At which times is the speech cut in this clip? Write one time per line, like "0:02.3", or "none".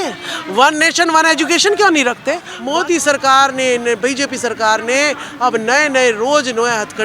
0:02.5

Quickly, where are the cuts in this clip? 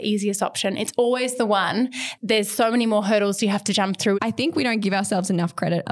0:02.1
0:04.2

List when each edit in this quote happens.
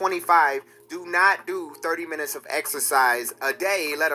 none

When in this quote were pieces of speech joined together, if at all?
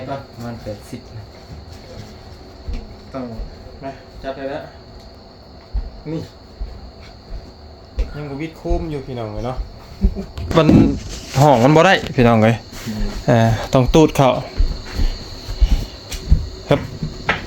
0:05.2

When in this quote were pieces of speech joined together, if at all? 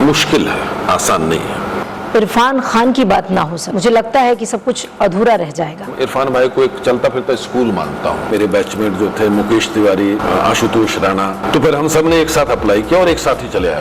0:01.8
0:03.6
0:05.9
0:08.3
0:10.2
0:11.4

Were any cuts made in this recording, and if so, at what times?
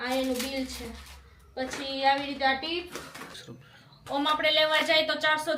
0:03.3

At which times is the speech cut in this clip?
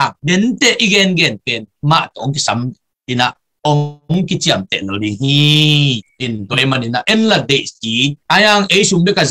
none

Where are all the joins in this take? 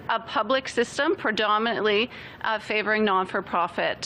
none

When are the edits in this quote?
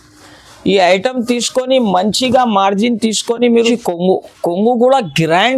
0:03.7

